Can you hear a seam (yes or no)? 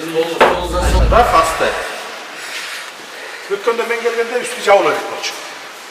yes